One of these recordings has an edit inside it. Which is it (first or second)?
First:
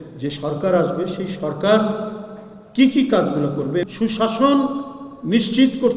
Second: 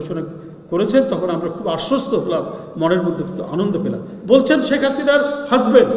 first